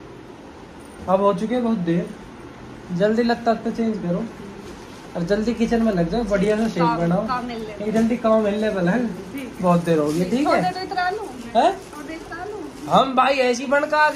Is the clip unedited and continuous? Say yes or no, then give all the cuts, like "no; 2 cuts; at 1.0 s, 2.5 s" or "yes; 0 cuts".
yes; 0 cuts